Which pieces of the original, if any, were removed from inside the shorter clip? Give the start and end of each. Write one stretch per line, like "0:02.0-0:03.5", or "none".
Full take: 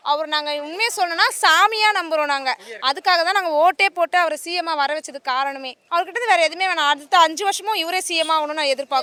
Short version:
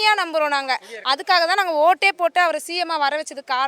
none